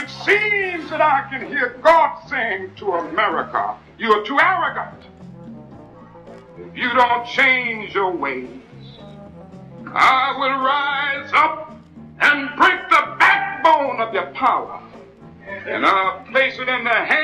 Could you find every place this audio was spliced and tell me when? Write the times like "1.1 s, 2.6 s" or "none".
none